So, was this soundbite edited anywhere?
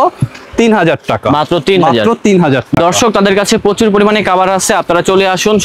no; 0 cuts

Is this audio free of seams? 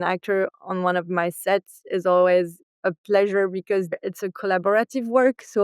no; 1 cut; at 4.0 s

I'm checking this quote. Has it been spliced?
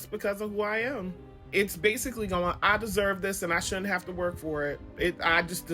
yes; 1 cut; at 1.4 s

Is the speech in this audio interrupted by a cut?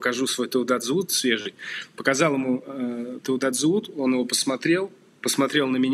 no; 0 cuts

